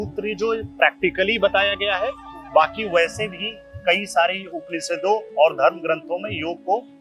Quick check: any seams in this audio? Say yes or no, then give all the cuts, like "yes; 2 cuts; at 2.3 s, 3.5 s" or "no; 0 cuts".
no; 0 cuts